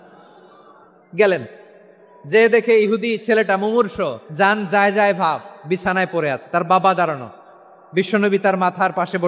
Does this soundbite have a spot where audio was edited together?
yes; 1 cut; at 4.2 s

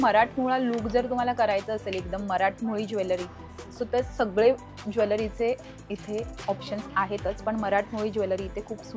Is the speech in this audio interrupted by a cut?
no; 0 cuts

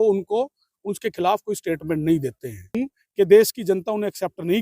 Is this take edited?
yes; 1 cut; at 2.8 s

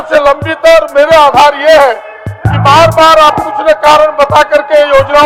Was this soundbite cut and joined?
no; 0 cuts

